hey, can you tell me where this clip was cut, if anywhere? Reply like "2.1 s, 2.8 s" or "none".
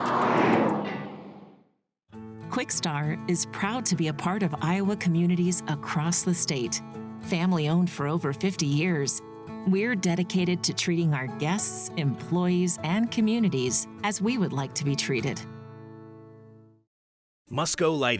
1.3 s